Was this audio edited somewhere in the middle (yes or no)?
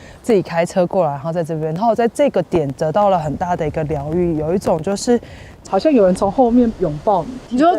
yes